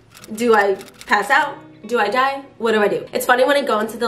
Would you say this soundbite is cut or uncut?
cut